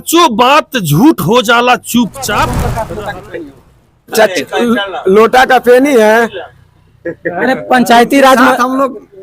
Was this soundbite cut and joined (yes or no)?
yes